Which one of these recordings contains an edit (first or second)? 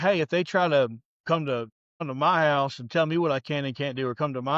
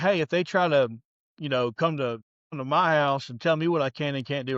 first